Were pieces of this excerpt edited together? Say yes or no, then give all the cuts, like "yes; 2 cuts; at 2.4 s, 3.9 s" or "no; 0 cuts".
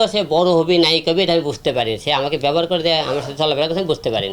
no; 0 cuts